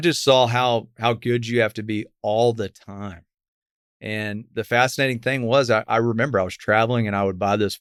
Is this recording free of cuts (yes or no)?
yes